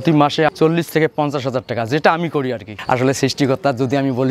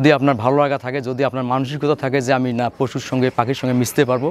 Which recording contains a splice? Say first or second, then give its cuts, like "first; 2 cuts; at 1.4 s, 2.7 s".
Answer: first; 1 cut; at 2.7 s